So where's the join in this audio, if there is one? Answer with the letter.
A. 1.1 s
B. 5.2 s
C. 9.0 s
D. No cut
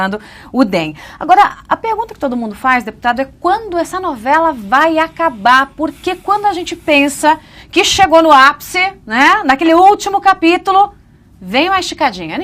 B